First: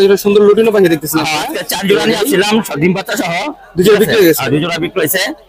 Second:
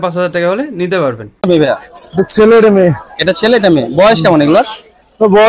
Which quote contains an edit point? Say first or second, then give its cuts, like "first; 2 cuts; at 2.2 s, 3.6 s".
second; 1 cut; at 1.4 s